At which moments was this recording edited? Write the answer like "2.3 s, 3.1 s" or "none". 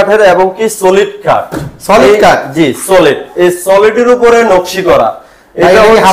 none

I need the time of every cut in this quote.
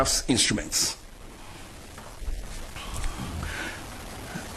none

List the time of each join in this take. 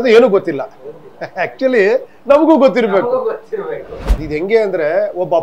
4.1 s

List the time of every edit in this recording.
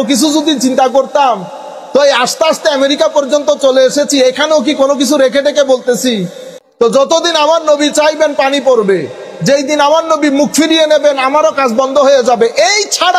6.5 s

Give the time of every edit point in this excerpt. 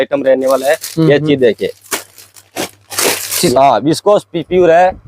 3.5 s

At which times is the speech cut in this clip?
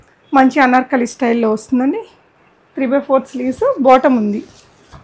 none

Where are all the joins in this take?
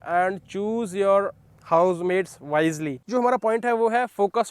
3.0 s

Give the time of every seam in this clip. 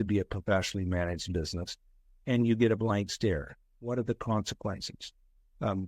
3.7 s

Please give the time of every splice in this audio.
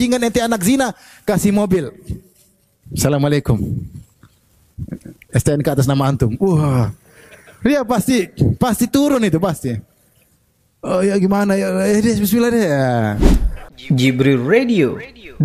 13.1 s

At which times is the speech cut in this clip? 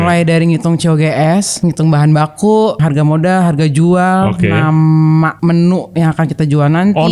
1.5 s, 2.8 s, 5.3 s

